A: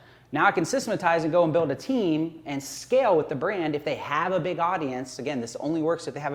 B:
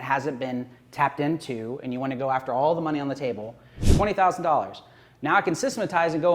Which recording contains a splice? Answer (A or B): B